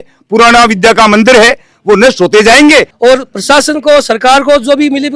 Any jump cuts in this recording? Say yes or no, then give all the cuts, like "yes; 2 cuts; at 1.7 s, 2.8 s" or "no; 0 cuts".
yes; 1 cut; at 2.9 s